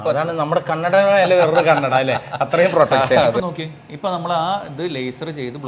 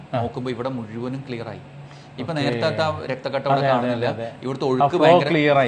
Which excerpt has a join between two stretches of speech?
first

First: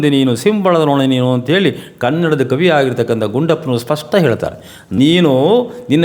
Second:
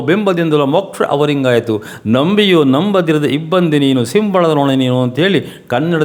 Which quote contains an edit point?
first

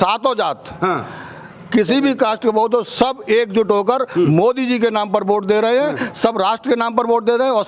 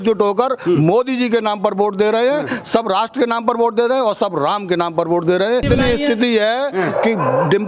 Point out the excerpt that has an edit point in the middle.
second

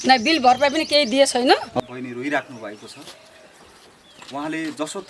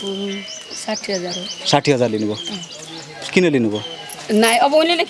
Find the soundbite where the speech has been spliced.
first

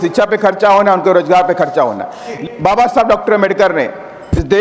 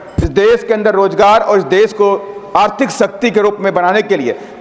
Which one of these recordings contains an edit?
first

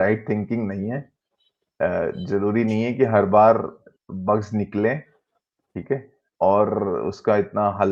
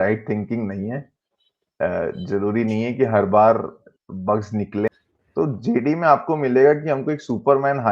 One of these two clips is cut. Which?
second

